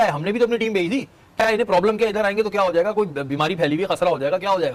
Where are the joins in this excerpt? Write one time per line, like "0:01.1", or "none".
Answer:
none